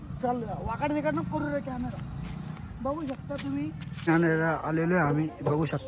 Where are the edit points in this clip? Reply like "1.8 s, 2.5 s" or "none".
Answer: 3.9 s

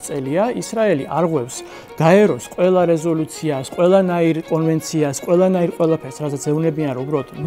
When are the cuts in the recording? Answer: none

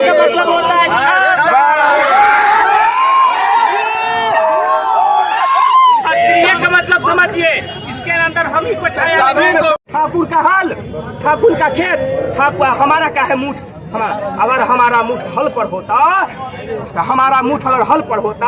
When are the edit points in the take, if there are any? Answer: 9.7 s

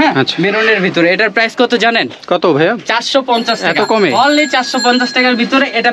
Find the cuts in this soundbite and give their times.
none

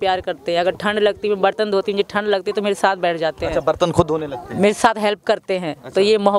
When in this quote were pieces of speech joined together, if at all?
none

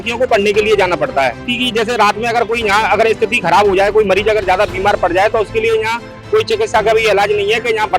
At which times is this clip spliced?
1.4 s

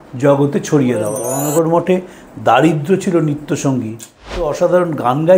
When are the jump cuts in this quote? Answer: 1.3 s, 4.5 s

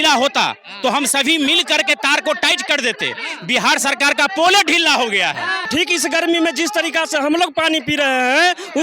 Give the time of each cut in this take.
5.7 s

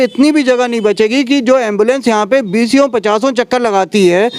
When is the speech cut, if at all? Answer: none

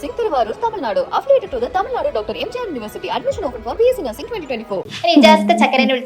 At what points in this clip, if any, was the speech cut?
4.9 s

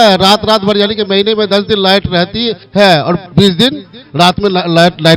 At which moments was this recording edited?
2.6 s, 3.2 s

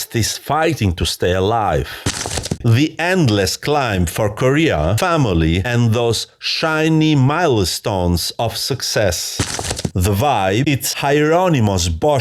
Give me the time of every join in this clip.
2.2 s, 9.4 s

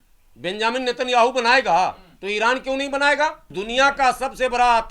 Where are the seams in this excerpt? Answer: 3.5 s

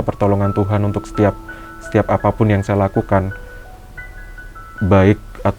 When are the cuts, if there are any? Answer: none

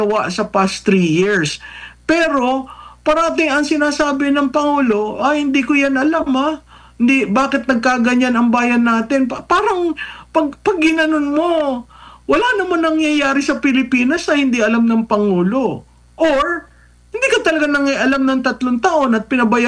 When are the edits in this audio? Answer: none

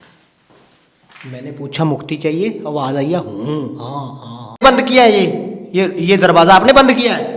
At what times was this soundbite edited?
4.6 s

